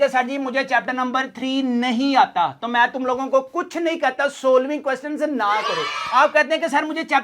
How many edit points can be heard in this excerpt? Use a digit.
0